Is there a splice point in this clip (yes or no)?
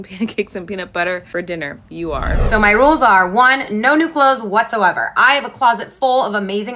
yes